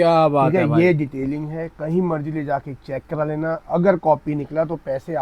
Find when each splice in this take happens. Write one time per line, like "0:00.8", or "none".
none